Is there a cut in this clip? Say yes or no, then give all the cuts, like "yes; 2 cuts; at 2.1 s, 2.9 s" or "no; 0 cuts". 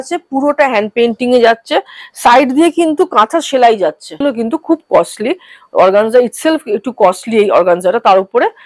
yes; 1 cut; at 4.2 s